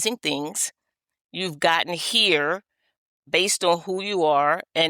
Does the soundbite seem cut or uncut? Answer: cut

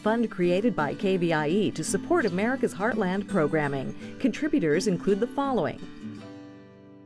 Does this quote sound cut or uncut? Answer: cut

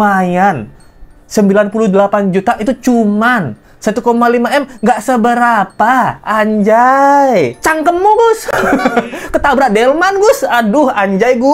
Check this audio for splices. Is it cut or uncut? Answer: cut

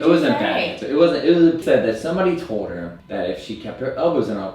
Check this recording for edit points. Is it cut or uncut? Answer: cut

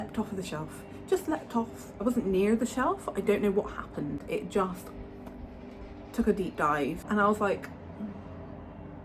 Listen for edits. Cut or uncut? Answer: cut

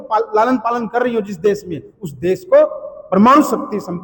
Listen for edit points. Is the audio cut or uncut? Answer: uncut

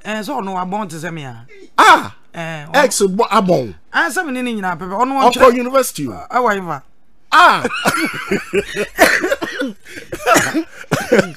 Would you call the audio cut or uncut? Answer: uncut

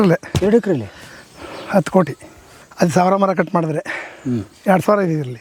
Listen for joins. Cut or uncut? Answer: uncut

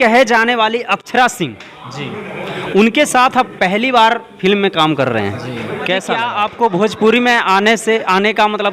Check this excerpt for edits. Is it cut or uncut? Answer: cut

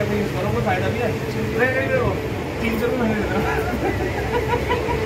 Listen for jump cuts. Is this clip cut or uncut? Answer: uncut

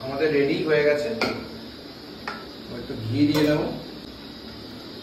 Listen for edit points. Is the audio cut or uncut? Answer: cut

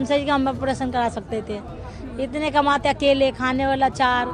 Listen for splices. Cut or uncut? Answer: uncut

